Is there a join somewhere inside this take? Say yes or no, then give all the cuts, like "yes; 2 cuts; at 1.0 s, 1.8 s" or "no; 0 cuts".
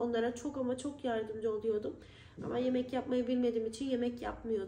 no; 0 cuts